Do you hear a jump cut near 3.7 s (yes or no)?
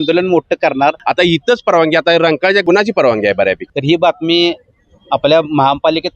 yes